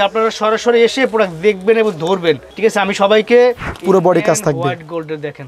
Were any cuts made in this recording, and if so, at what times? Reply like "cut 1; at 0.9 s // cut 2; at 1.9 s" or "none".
cut 1; at 2.5 s // cut 2; at 3.7 s